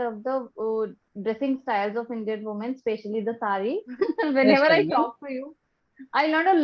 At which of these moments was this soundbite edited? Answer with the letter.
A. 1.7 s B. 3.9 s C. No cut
B